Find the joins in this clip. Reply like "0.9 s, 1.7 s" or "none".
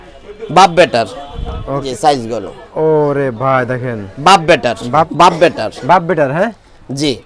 1.9 s, 5.1 s